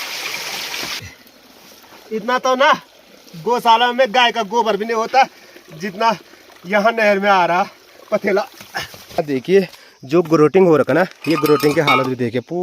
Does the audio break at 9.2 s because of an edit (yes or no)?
yes